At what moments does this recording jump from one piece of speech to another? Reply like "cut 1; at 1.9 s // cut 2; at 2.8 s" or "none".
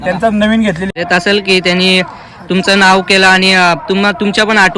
cut 1; at 1.0 s